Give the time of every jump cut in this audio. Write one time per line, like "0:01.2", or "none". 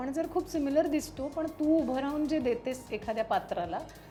none